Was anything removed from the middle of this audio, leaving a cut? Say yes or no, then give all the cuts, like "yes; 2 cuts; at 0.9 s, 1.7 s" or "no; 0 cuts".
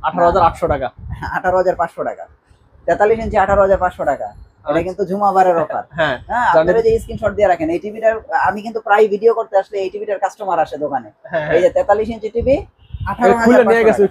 no; 0 cuts